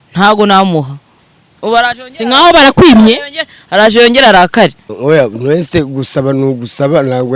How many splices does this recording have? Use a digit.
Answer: 1